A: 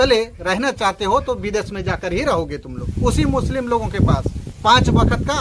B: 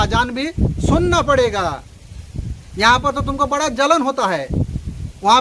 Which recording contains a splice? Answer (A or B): A